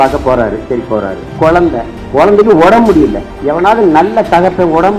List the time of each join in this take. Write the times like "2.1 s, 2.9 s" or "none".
1.2 s, 2.0 s, 3.3 s